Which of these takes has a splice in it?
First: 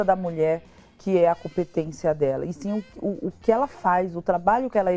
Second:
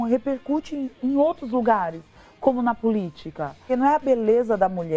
second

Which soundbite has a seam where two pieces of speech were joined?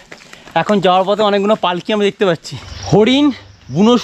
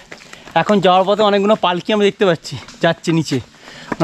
first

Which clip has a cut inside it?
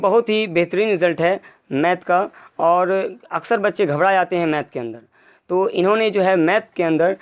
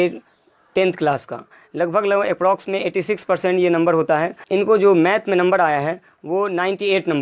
second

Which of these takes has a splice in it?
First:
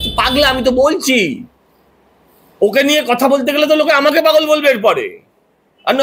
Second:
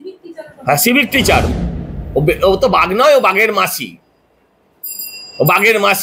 second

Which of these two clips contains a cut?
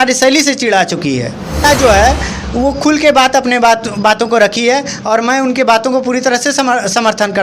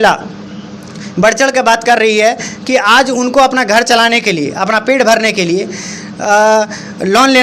first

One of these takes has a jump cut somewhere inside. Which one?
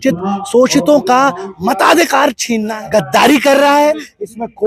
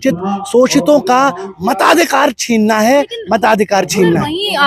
first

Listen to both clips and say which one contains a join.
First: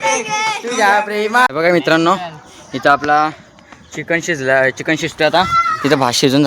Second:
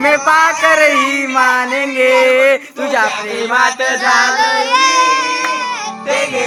first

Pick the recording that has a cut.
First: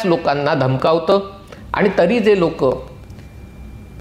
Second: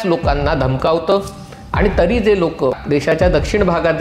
second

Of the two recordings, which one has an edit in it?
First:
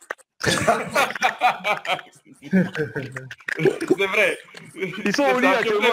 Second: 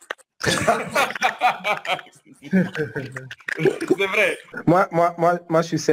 second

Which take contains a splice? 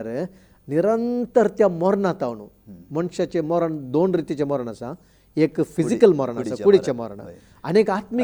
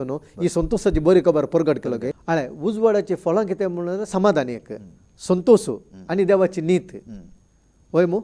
second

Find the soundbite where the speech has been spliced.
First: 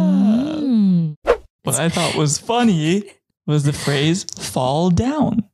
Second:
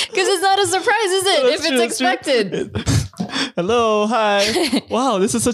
first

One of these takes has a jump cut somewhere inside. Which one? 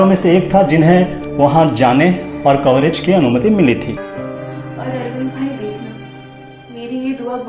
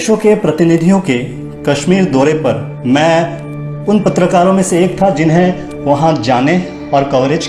first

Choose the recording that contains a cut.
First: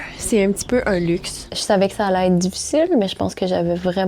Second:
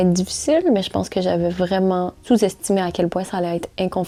first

